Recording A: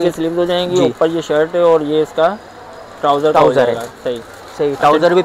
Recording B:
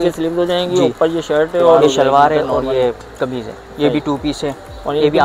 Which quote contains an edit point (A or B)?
B